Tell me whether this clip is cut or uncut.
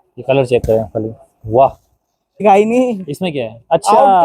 cut